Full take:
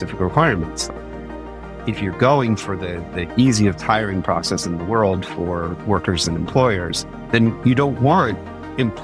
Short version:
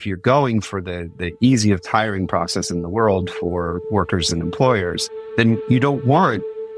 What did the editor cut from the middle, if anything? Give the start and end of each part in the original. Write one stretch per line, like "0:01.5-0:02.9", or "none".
none